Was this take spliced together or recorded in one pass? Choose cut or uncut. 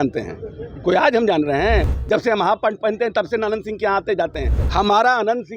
cut